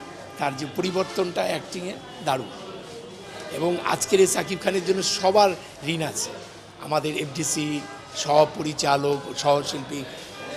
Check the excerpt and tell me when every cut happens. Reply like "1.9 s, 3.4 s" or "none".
none